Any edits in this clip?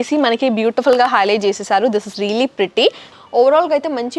yes; 1 cut; at 3.1 s

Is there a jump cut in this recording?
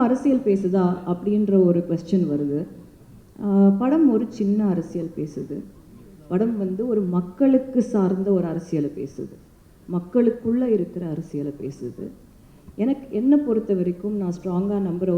no; 0 cuts

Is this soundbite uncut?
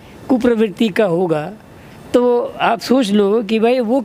yes; 0 cuts

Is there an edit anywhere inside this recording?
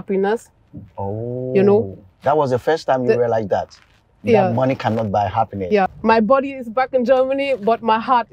yes; 1 cut; at 5.9 s

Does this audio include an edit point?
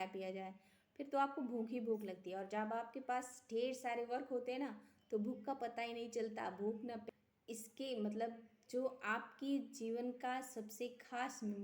yes; 1 cut; at 7.0 s

